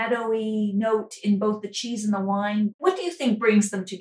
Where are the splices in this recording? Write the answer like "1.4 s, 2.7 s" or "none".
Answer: 2.7 s